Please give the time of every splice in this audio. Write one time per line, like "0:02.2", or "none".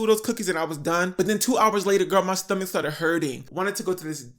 0:01.1
0:03.4